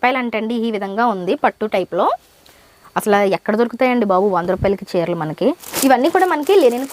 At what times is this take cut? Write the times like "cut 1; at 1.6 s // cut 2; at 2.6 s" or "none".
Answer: cut 1; at 5.8 s